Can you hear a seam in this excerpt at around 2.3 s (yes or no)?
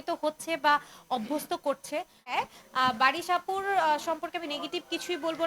yes